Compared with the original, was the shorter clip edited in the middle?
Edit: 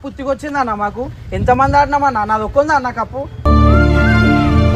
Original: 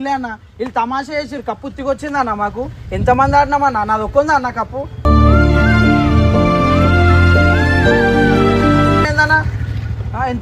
no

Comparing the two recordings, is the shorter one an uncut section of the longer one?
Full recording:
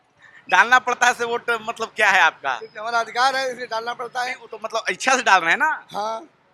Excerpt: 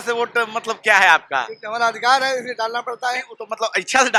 yes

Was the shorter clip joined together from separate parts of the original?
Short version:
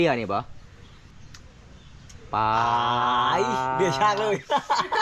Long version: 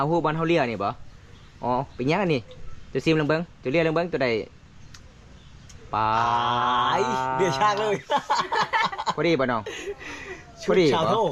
yes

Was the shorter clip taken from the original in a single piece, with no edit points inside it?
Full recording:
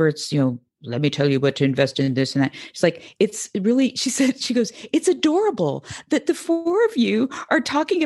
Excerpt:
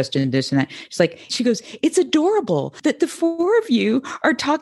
no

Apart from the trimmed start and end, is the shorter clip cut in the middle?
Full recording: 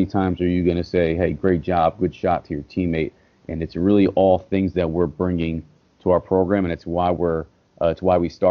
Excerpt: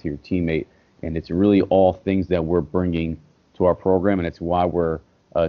no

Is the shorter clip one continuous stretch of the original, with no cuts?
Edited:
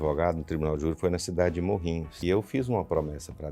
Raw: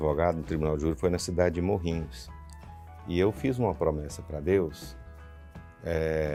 no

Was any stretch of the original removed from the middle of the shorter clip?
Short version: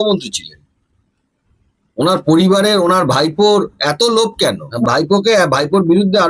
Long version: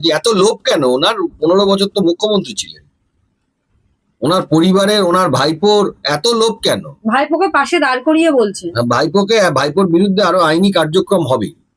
yes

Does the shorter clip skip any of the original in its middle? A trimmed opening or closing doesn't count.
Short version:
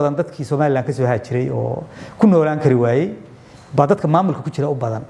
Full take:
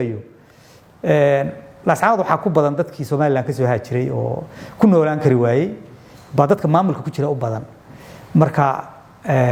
no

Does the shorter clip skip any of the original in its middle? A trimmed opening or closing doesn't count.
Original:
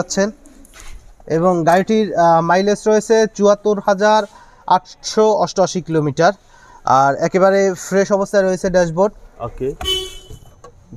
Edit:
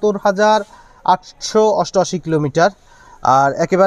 no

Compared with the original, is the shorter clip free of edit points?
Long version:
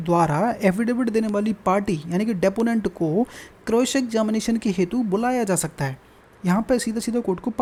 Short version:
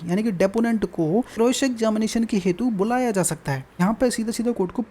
no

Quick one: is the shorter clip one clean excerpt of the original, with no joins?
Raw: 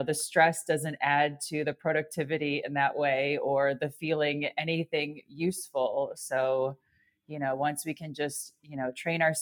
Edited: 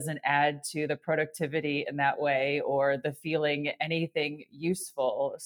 yes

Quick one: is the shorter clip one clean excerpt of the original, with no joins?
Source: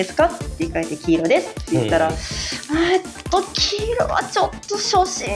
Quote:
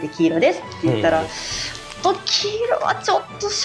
no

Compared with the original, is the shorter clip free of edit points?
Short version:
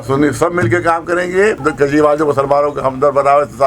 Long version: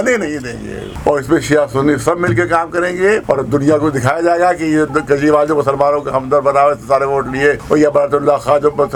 no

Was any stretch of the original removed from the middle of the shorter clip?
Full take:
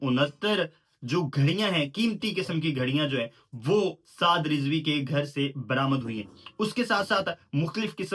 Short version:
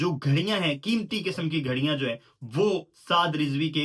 no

